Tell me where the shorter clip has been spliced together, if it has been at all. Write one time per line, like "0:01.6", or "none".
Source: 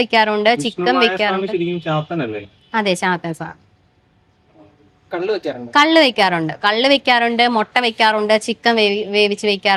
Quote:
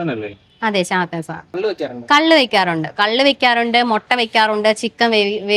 0:01.5